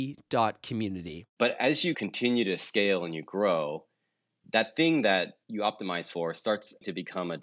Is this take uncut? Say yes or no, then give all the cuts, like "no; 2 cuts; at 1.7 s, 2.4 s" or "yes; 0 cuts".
no; 1 cut; at 1.2 s